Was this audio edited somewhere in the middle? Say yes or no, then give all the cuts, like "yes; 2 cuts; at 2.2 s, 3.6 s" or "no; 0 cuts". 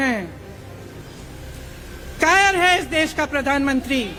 no; 0 cuts